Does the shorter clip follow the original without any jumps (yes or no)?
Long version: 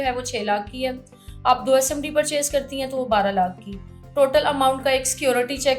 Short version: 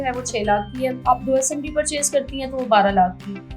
no